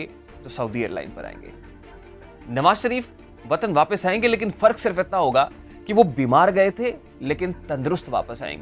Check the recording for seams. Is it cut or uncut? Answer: uncut